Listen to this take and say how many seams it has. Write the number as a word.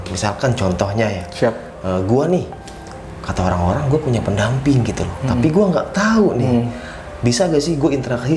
zero